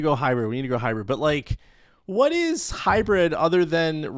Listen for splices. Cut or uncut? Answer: uncut